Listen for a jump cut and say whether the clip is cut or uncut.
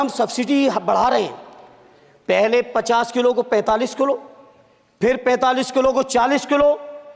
uncut